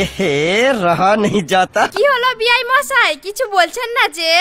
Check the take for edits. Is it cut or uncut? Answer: uncut